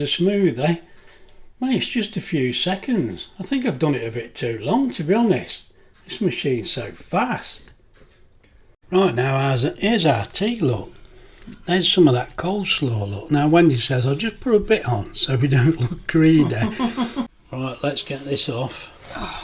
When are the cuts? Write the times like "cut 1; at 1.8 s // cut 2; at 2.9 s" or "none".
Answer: cut 1; at 8.7 s // cut 2; at 17.4 s